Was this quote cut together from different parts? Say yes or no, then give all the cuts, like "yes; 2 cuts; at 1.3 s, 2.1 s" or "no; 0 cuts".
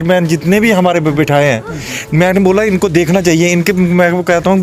no; 0 cuts